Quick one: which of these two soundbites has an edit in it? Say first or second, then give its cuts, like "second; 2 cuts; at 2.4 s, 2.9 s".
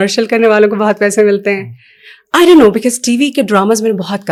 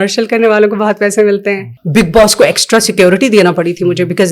second; 1 cut; at 1.7 s